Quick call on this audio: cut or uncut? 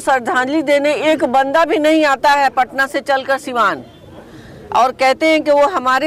uncut